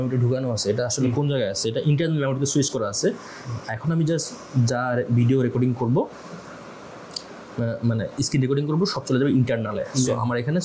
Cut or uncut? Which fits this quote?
uncut